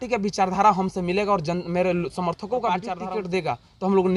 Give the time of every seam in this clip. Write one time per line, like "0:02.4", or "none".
0:02.9